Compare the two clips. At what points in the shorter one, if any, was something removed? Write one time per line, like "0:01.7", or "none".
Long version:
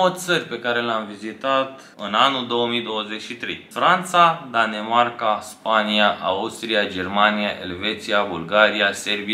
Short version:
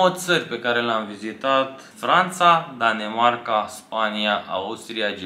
0:01.9